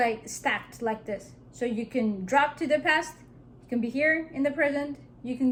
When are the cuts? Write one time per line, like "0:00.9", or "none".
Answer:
none